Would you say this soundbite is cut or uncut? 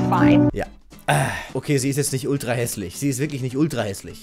cut